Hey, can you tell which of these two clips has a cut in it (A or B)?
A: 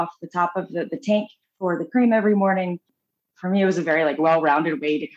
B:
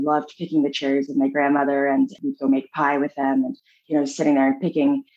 B